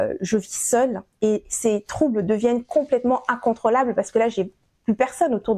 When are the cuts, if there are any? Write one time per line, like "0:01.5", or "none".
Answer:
none